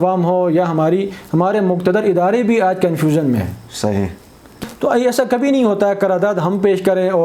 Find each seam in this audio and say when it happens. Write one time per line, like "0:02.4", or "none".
0:04.6